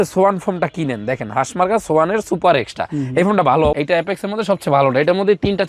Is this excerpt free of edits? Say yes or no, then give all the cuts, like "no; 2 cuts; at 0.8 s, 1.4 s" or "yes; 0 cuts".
no; 1 cut; at 3.7 s